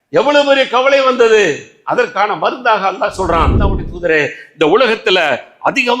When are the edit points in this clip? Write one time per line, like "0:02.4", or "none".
0:03.6